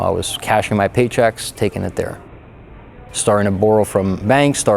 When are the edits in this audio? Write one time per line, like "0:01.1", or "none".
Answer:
none